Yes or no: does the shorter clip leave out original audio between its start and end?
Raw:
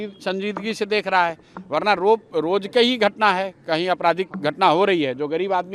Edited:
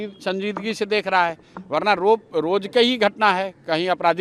no